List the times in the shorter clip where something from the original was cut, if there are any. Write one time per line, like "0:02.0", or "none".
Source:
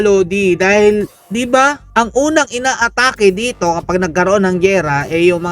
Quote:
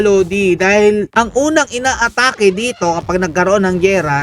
0:01.1